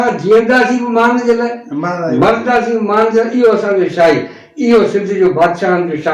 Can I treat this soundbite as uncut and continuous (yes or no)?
yes